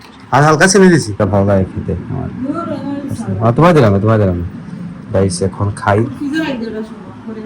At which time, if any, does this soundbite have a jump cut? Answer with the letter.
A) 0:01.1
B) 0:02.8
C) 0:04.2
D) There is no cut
A